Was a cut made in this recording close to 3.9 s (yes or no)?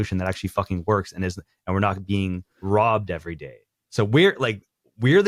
no